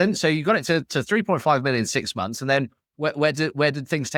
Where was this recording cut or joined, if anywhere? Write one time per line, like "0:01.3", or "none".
none